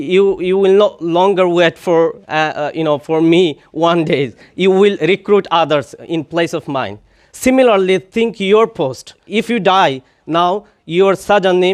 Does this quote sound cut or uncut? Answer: cut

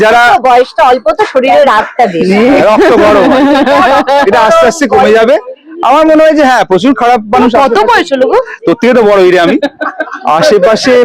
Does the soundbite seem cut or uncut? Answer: uncut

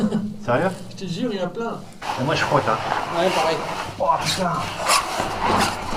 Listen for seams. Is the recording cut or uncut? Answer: cut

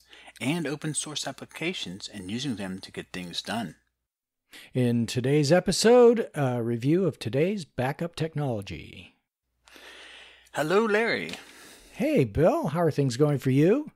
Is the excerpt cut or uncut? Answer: cut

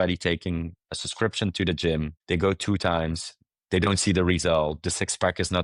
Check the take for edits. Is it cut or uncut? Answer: cut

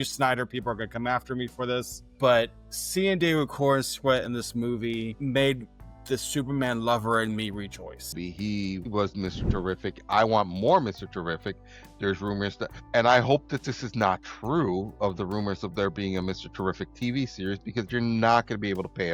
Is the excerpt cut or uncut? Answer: cut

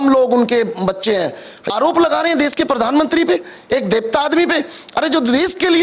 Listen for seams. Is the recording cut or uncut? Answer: cut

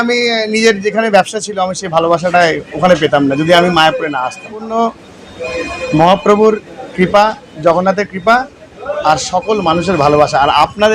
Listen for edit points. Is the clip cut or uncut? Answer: cut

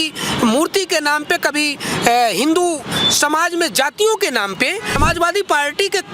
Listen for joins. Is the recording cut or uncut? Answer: cut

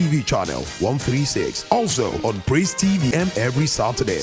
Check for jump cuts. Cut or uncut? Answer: cut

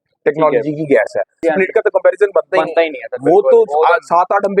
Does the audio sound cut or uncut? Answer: cut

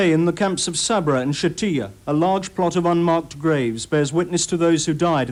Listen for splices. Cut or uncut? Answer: uncut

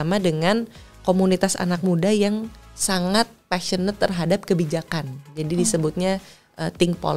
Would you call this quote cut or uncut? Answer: uncut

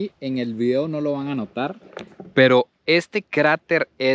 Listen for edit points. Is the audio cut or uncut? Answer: uncut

